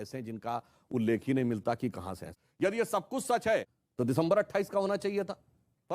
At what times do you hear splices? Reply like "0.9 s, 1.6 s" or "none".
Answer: 2.2 s, 3.8 s